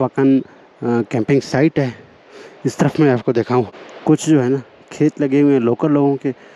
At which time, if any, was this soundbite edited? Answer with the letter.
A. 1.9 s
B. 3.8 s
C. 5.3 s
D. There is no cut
B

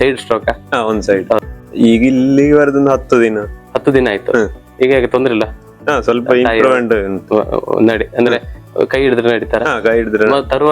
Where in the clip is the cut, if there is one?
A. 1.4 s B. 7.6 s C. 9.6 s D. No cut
A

